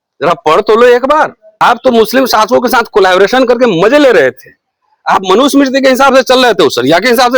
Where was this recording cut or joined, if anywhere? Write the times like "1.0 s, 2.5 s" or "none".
1.6 s